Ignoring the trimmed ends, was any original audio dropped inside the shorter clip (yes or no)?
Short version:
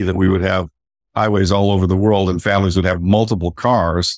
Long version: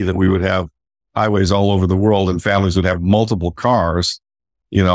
no